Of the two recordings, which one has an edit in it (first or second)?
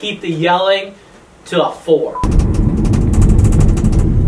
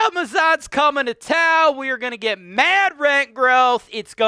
first